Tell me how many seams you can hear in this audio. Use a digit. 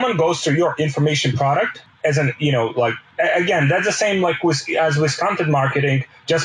2